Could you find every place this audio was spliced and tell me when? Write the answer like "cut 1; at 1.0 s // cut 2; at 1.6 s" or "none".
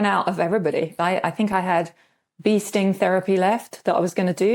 cut 1; at 0.9 s